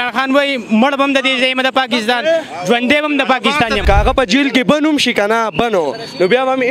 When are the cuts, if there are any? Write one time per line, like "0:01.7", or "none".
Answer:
0:03.8